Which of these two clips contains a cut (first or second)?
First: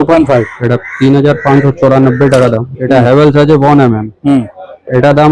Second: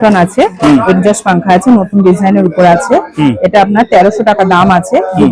first